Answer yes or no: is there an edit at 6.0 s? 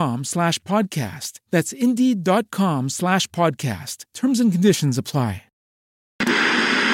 yes